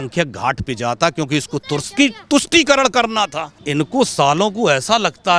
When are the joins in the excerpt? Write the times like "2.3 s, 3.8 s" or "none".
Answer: 3.6 s